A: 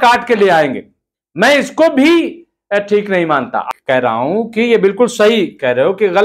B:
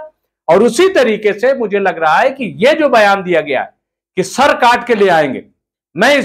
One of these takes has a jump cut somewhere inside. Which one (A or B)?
A